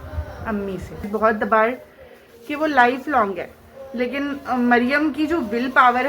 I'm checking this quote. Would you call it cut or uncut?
cut